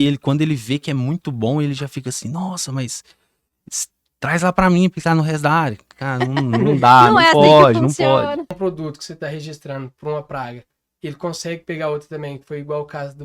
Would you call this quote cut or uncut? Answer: cut